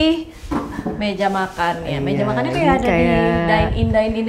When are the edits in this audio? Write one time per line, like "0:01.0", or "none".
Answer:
none